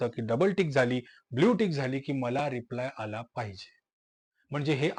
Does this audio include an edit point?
no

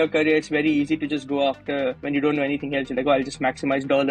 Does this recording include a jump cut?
yes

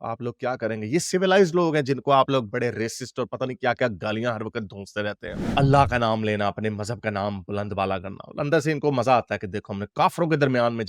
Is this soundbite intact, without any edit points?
no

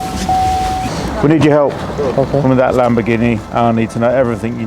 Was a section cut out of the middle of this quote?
yes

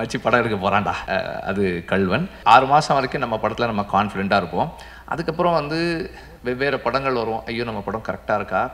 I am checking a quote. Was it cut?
yes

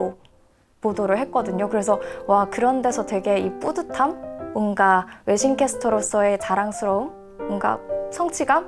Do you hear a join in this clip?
no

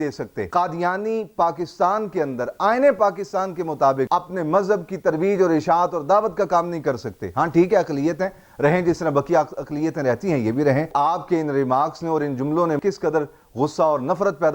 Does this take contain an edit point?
yes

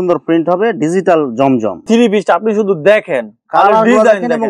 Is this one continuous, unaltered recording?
no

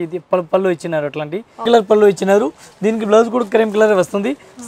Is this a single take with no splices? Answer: no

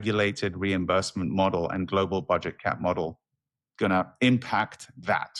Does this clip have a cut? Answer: no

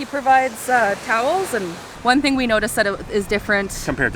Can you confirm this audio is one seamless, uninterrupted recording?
no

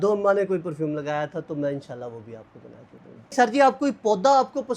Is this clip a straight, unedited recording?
no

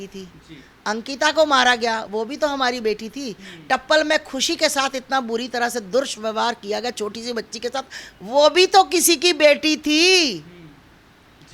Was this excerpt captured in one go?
yes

